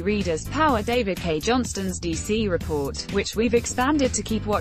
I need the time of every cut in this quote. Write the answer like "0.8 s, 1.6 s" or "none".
none